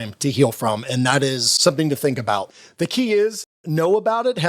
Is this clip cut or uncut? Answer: cut